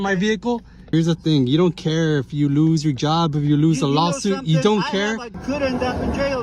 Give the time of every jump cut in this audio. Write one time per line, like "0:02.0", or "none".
0:00.9
0:05.4